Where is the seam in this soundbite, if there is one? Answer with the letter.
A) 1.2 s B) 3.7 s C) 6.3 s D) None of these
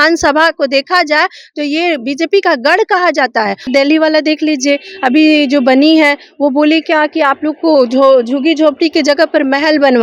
B